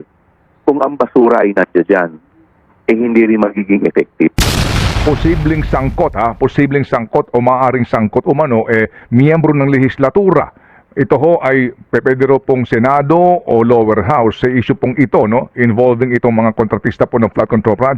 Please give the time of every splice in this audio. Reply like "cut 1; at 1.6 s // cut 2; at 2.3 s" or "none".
cut 1; at 5.0 s